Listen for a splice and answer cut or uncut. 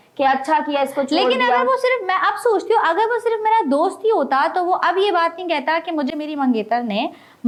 uncut